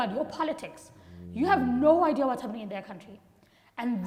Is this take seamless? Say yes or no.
yes